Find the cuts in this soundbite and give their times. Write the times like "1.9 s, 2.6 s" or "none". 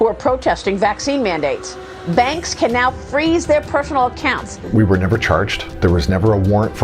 4.5 s, 5.6 s